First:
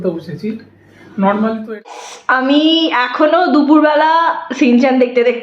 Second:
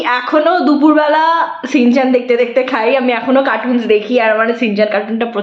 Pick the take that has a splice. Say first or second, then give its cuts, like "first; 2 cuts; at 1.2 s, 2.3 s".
first; 1 cut; at 1.9 s